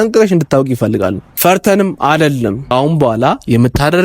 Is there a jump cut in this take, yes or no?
yes